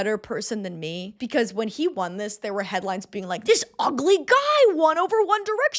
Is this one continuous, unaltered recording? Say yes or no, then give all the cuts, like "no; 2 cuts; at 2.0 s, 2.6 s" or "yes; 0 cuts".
yes; 0 cuts